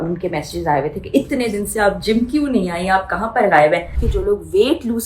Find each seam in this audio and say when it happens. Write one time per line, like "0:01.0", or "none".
0:04.0